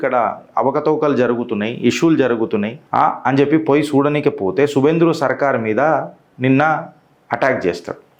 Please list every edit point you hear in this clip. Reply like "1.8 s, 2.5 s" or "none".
none